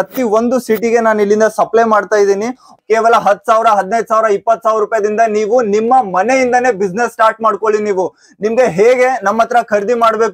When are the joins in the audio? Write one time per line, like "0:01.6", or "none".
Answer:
0:02.7

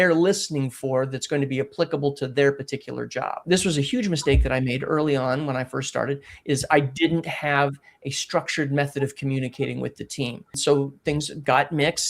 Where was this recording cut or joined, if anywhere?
0:03.4
0:10.6

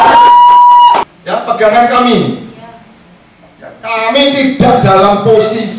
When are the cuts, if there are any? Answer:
0:01.2

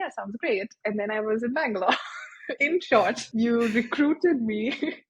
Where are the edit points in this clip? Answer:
0:03.2

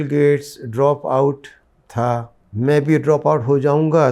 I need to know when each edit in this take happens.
0:02.4

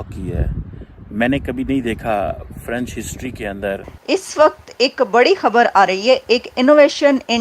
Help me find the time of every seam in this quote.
0:03.9

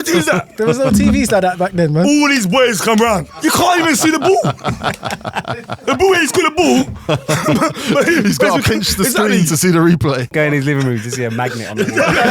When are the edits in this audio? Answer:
0:03.4
0:10.3

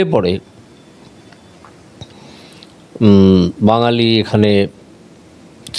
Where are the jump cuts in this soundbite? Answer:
none

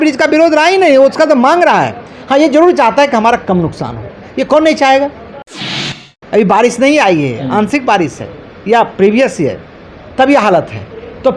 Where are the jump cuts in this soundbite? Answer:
0:05.7

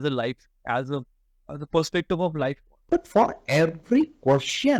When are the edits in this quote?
0:02.7

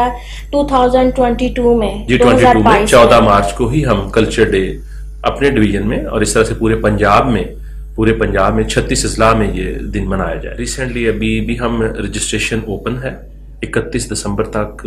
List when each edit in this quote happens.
0:10.7

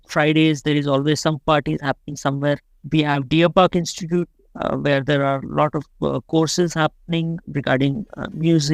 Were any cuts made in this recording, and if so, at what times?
0:07.4

